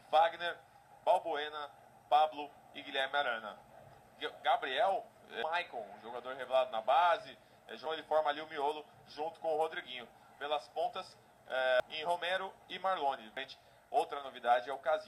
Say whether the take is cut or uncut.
cut